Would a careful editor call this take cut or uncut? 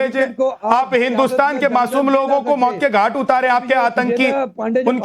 cut